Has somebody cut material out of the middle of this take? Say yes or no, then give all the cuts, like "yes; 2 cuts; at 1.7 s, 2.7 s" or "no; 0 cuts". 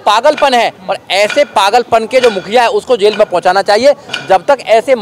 no; 0 cuts